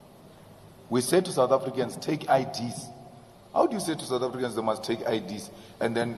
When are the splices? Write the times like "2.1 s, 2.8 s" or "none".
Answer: none